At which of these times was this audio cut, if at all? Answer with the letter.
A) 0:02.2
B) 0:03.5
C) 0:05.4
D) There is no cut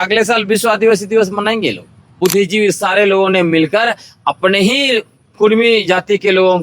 A